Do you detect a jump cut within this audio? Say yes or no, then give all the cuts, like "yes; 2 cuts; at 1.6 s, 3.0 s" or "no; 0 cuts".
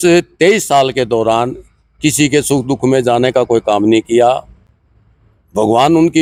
no; 0 cuts